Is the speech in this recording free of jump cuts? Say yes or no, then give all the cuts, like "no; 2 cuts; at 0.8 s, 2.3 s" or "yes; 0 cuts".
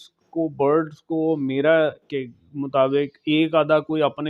yes; 0 cuts